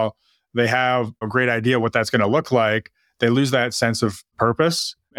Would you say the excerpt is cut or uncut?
cut